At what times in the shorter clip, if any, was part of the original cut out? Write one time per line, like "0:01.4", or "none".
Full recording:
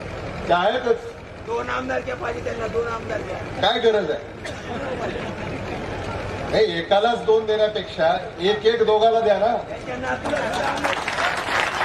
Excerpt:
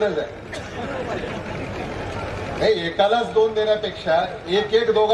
none